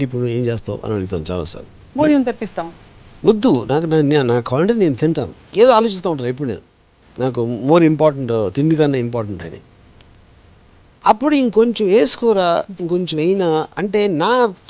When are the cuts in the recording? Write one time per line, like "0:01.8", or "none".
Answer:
0:05.3